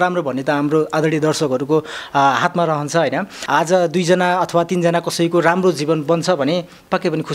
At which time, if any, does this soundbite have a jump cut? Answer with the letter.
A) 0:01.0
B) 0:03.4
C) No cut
B